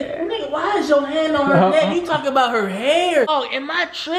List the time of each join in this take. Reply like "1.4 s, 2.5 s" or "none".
3.3 s